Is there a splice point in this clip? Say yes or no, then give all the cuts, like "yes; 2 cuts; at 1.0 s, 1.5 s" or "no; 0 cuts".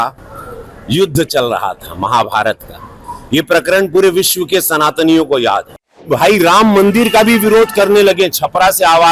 yes; 1 cut; at 6.1 s